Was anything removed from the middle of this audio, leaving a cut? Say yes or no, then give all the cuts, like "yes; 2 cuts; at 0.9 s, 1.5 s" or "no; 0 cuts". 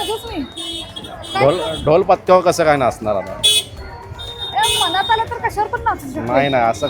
no; 0 cuts